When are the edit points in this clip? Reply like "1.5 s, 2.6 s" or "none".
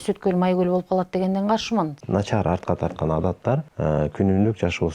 2.0 s, 3.7 s